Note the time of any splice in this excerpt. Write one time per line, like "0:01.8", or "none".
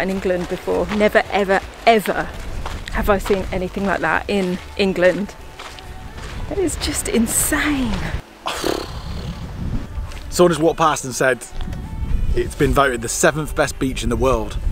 none

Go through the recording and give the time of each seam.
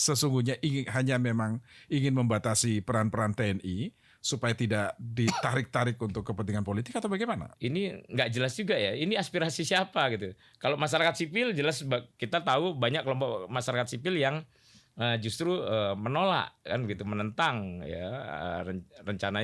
0:07.5

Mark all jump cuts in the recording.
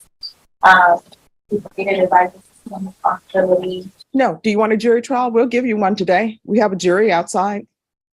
none

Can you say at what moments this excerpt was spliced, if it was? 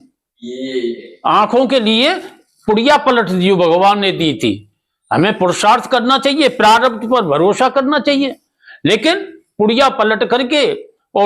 none

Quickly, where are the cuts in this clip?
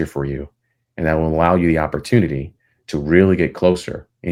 none

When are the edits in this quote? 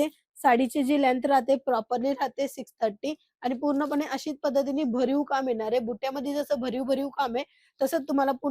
none

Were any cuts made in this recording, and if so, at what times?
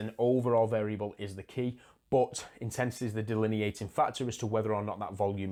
none

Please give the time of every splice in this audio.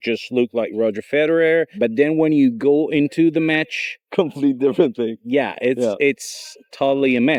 none

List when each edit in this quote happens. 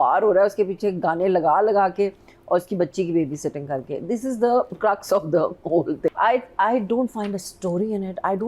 0:06.1

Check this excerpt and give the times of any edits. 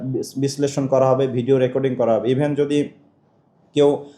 none

